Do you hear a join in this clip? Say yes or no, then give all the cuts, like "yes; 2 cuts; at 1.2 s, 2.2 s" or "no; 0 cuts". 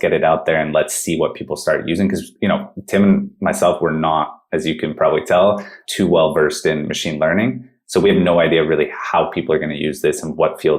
no; 0 cuts